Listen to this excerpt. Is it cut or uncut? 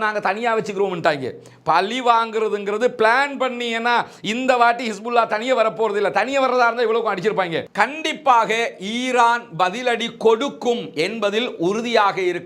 cut